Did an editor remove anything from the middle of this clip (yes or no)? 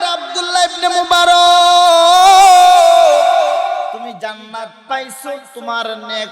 yes